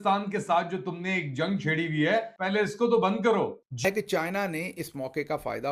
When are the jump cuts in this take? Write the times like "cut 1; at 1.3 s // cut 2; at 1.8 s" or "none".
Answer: cut 1; at 3.9 s